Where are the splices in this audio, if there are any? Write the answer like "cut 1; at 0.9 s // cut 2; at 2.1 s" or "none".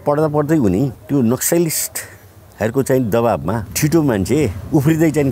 cut 1; at 1.0 s // cut 2; at 3.7 s